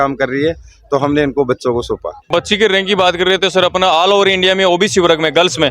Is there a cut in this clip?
yes; 1 cut; at 2.3 s

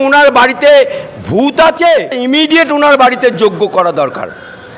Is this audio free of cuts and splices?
no; 1 cut; at 2.2 s

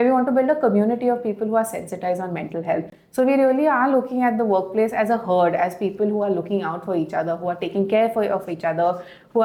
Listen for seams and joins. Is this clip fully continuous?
yes; 0 cuts

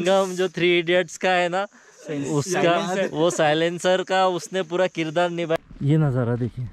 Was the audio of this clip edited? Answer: yes; 1 cut; at 5.6 s

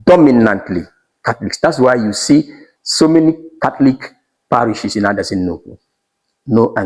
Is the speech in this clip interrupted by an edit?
no; 0 cuts

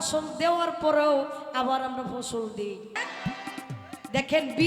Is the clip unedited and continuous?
no; 1 cut; at 3.0 s

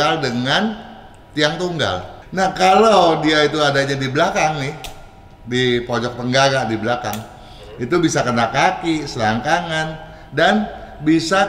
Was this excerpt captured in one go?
no; 1 cut; at 2.2 s

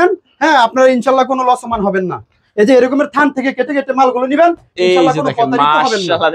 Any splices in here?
no; 0 cuts

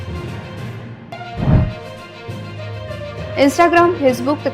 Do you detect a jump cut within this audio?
yes; 1 cut; at 1.0 s

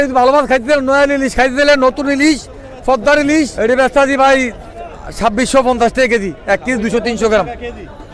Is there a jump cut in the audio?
yes; 1 cut; at 3.5 s

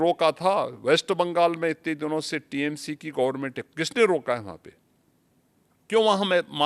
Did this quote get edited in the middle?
no; 0 cuts

